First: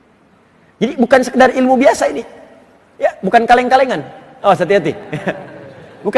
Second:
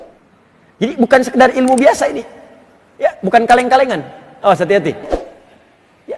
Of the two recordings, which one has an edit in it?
second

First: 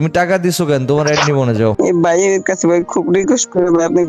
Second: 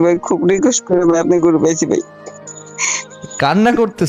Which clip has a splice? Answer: first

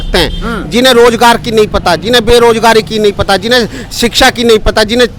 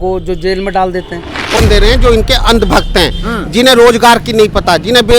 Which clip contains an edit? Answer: second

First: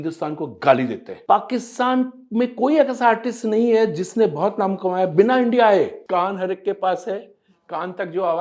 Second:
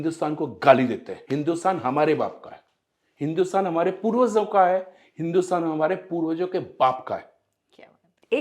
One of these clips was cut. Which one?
first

